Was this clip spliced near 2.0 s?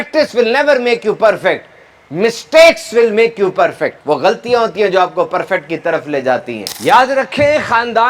no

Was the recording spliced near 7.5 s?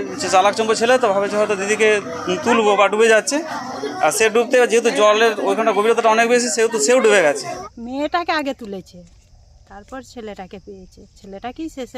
yes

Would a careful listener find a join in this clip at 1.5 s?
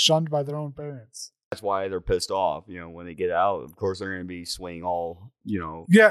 yes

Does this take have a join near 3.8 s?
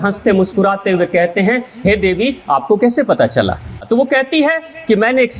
yes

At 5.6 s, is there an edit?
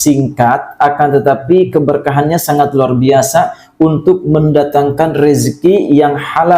no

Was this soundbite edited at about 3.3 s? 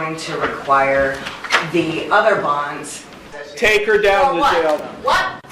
yes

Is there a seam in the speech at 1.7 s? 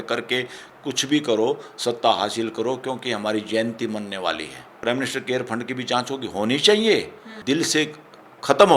no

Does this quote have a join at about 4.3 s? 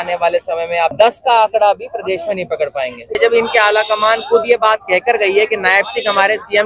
no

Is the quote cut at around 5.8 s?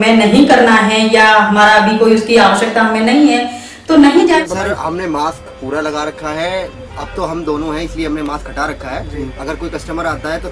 no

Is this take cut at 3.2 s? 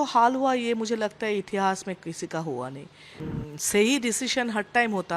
yes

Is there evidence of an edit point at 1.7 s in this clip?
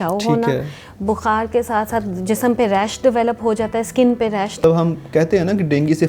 no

